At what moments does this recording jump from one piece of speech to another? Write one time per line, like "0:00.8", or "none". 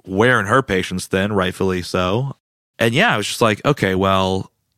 0:02.3